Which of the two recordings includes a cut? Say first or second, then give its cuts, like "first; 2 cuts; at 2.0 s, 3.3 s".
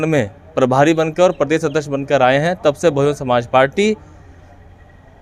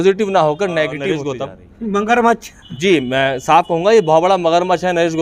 second; 1 cut; at 1.2 s